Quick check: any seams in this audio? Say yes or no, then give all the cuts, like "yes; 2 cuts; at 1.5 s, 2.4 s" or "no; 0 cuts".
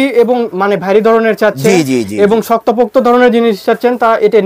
no; 0 cuts